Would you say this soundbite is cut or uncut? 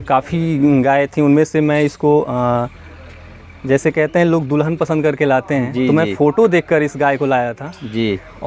uncut